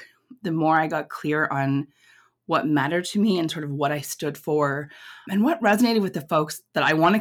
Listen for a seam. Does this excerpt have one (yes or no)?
no